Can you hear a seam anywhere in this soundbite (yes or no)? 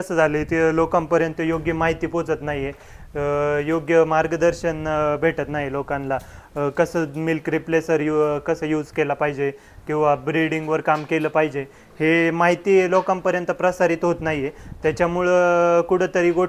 no